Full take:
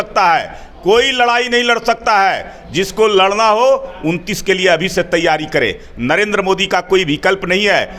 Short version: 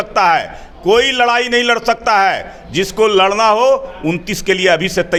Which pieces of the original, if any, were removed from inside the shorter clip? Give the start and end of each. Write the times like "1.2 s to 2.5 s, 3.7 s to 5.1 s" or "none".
none